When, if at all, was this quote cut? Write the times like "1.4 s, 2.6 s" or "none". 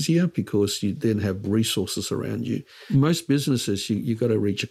2.8 s